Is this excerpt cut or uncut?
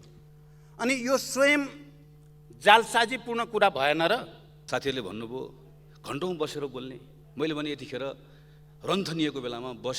cut